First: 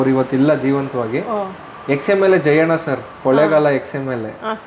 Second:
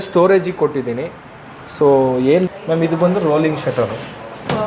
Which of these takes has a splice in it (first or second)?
second